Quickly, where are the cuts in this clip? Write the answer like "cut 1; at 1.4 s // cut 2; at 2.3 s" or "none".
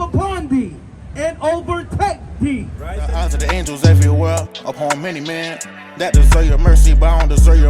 cut 1; at 3.2 s